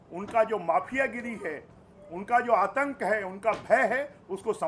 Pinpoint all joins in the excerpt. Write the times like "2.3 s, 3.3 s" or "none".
none